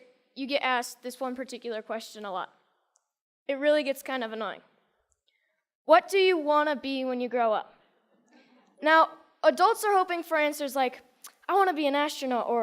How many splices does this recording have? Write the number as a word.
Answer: one